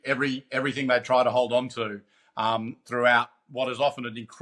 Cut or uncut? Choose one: uncut